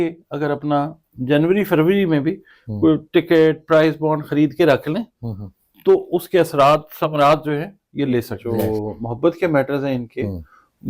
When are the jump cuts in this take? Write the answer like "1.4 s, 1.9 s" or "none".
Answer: 8.4 s